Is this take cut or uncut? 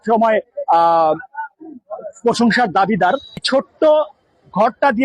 cut